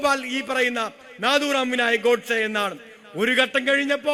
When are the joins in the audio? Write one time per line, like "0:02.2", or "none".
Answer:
none